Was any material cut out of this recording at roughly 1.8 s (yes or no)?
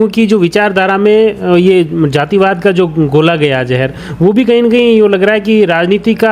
no